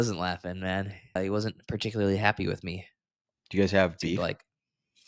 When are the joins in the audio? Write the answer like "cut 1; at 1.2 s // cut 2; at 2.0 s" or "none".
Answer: cut 1; at 1.2 s